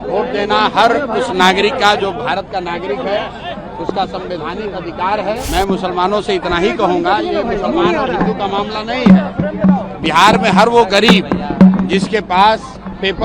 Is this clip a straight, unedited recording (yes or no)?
no